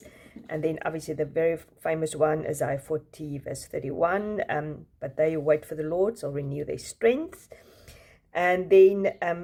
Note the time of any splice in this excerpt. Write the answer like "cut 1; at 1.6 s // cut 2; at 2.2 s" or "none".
none

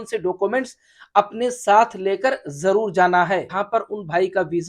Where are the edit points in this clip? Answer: cut 1; at 3.6 s

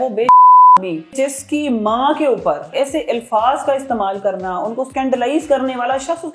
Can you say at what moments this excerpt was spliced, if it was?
cut 1; at 1.1 s // cut 2; at 2.7 s // cut 3; at 4.9 s

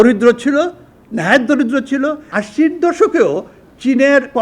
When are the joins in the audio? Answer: cut 1; at 2.3 s

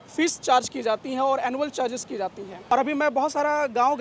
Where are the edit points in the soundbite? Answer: cut 1; at 2.7 s

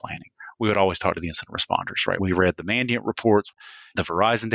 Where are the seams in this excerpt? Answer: cut 1; at 3.6 s

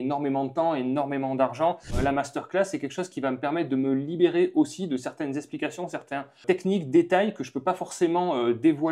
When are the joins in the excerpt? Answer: cut 1; at 1.9 s // cut 2; at 6.4 s

